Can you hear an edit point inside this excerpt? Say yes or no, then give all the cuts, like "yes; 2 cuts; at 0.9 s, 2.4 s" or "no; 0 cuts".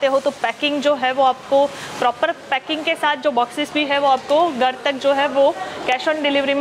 no; 0 cuts